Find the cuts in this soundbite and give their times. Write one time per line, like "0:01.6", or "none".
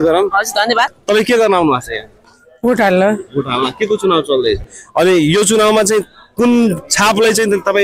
0:01.0
0:04.7